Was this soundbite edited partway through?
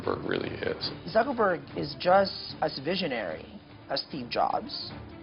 yes; 2 cuts; at 0.9 s, 2.4 s

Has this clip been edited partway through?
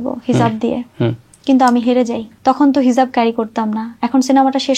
yes; 2 cuts; at 1.3 s, 2.3 s

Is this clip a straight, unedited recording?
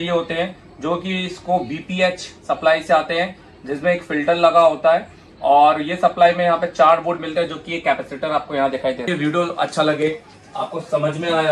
no; 1 cut; at 9.1 s

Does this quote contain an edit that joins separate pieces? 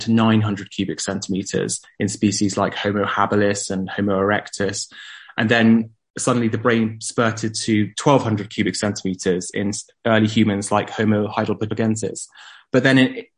yes; 1 cut; at 11.3 s

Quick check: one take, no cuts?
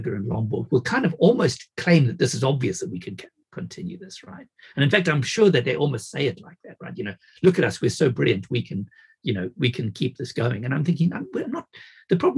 yes; 0 cuts

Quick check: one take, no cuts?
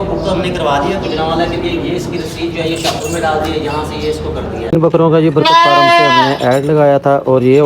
no; 1 cut; at 4.7 s

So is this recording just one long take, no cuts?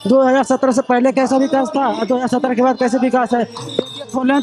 yes; 0 cuts

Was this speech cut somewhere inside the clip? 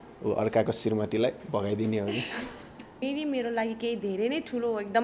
yes; 1 cut; at 3.0 s

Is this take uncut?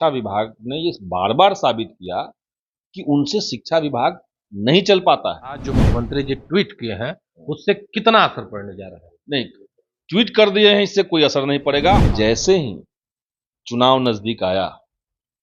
no; 2 cuts; at 5.8 s, 12.0 s

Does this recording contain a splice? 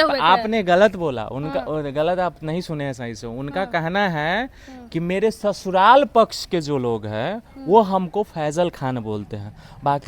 no; 0 cuts

